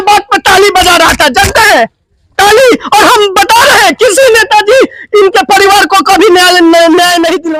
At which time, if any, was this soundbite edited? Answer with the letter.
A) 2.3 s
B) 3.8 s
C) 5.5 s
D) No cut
D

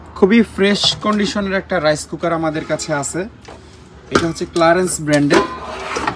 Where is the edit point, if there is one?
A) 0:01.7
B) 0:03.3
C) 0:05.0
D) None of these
D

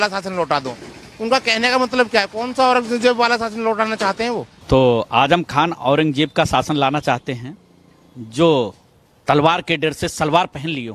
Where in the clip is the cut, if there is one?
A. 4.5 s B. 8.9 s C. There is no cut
A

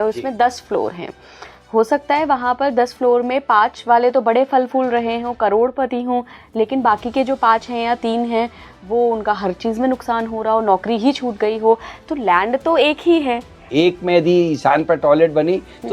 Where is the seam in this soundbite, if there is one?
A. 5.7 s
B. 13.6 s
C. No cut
B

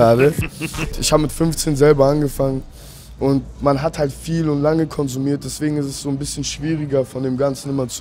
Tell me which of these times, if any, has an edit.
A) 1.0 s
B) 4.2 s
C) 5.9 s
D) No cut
A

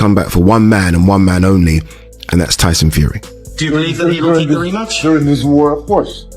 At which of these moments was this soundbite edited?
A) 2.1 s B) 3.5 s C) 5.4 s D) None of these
B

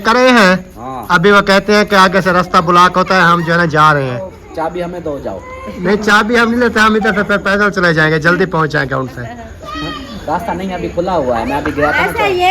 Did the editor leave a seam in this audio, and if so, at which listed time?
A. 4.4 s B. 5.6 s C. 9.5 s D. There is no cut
A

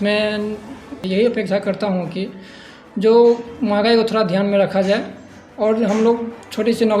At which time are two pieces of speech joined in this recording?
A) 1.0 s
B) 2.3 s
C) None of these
A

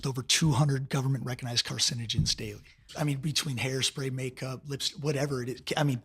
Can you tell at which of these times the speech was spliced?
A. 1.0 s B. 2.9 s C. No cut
B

